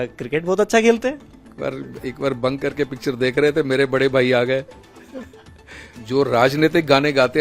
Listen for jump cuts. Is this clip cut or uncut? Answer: cut